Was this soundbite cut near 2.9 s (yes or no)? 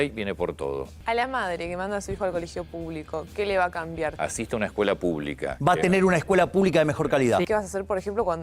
no